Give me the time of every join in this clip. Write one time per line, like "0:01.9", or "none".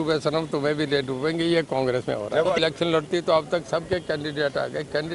0:02.6